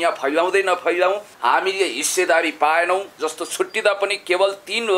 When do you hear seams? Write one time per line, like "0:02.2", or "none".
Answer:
0:01.3